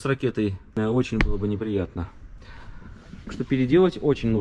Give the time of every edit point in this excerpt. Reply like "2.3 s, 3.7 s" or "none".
none